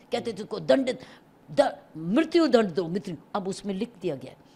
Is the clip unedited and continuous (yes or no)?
yes